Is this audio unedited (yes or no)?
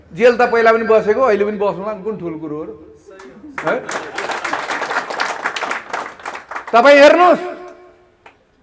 yes